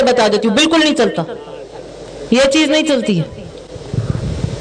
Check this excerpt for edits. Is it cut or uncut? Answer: uncut